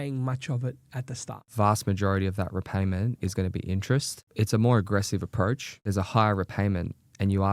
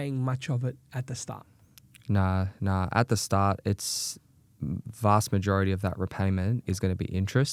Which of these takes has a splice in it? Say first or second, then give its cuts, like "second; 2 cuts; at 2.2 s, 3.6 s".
first; 3 cuts; at 1.4 s, 4.2 s, 5.7 s